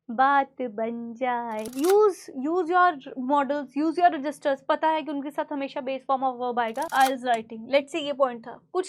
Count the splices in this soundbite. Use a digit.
2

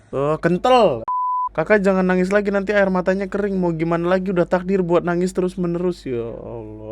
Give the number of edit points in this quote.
1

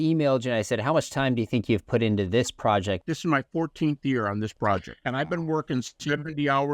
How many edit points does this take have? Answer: 2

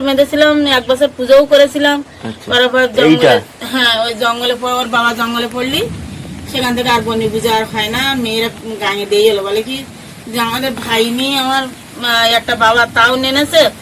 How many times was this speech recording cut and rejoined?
0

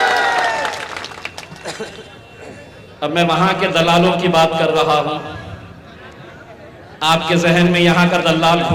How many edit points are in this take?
0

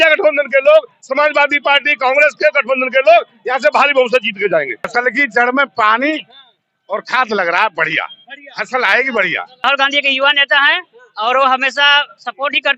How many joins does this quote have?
2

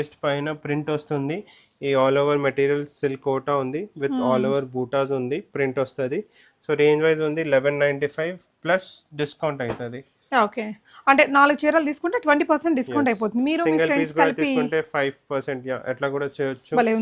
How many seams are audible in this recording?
0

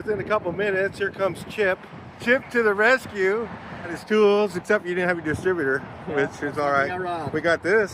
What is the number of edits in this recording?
2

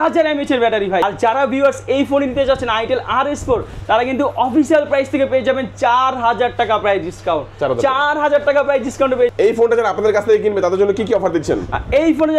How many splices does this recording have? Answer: 2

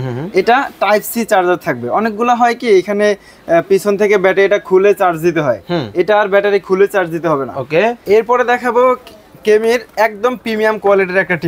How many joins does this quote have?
1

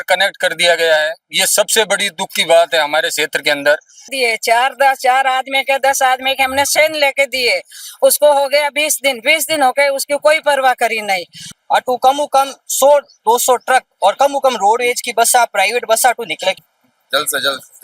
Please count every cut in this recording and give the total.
3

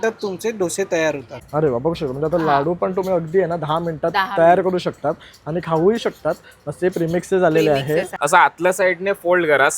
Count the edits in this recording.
2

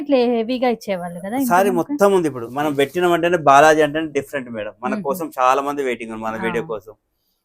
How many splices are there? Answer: 1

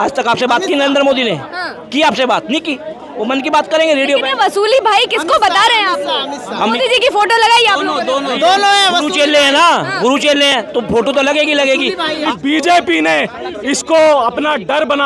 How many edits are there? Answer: 1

